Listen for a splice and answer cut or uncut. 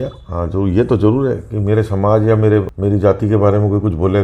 cut